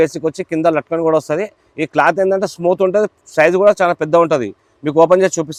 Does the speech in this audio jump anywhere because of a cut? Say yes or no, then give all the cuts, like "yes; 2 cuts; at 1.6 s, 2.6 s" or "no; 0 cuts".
no; 0 cuts